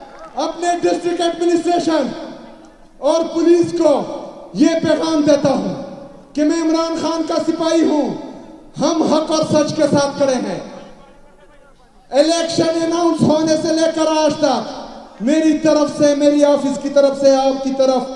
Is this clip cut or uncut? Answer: uncut